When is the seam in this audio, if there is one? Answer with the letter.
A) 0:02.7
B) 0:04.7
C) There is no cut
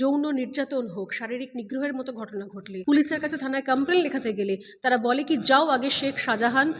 A